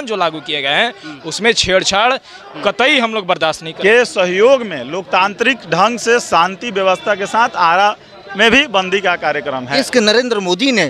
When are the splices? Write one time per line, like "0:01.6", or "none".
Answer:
0:03.7
0:09.7